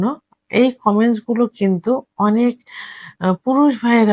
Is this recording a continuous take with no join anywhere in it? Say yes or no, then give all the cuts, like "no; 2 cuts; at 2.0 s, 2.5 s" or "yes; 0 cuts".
yes; 0 cuts